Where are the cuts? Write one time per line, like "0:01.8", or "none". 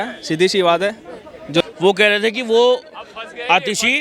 0:01.6